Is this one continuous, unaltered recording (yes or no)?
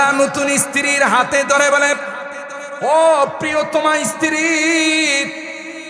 yes